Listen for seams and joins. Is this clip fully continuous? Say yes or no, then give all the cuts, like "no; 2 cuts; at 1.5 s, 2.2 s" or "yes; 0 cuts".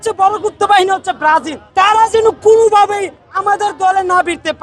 no; 1 cut; at 1.6 s